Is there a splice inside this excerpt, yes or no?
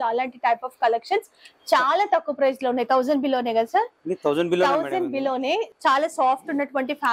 yes